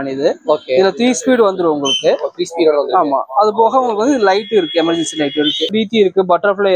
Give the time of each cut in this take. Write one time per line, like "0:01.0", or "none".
0:05.7